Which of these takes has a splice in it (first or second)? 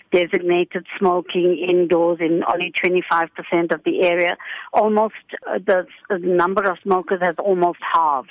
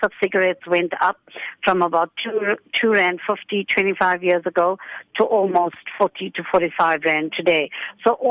first